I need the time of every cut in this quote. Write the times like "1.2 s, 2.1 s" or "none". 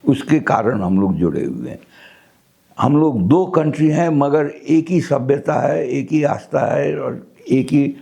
none

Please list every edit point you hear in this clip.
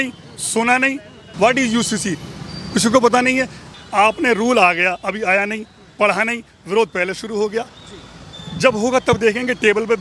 1.3 s, 3.7 s

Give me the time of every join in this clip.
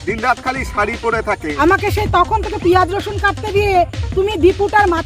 1.5 s

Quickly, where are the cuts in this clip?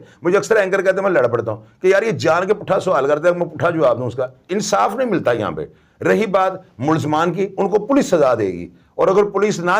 none

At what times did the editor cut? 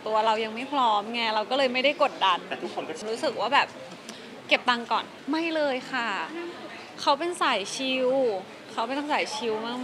3.0 s, 5.1 s

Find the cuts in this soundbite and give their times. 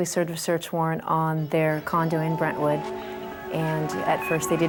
none

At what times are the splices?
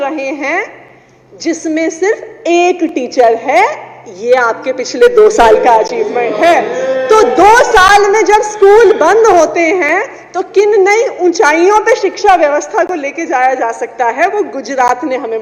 none

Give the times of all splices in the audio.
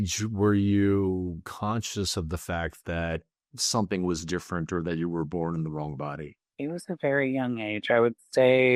none

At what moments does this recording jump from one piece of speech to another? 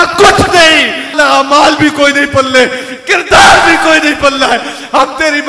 1.1 s

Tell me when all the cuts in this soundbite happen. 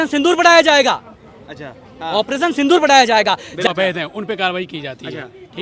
3.7 s

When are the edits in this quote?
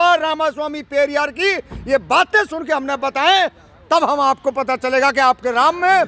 none

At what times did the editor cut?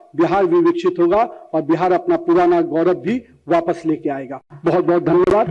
none

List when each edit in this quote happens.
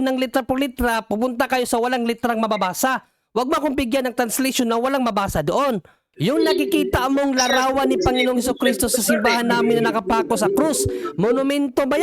6.0 s

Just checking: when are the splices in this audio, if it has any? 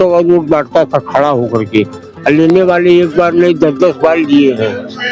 none

